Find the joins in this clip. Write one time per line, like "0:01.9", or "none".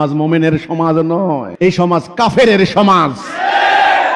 0:01.5